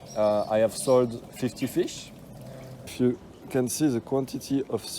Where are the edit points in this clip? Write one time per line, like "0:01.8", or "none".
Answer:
0:02.9